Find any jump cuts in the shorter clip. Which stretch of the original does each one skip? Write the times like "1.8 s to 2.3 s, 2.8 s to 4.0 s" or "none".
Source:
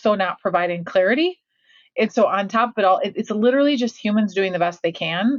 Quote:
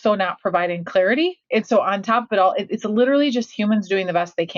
1.4 s to 1.9 s